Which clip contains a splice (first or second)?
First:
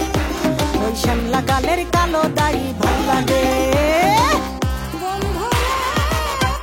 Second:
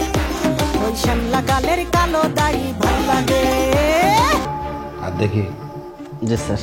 second